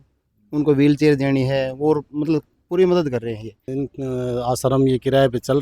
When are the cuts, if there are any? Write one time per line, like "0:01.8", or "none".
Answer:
0:03.6